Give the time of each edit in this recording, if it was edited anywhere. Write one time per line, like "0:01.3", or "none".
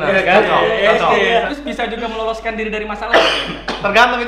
0:01.5